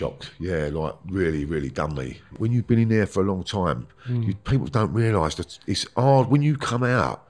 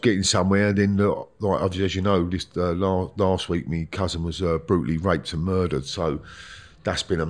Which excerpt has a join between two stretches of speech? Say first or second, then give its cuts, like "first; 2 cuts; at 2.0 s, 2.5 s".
first; 1 cut; at 2.3 s